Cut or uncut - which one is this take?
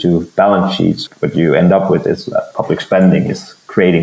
cut